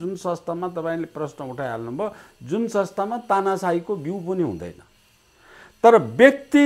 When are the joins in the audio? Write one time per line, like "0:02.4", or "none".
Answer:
none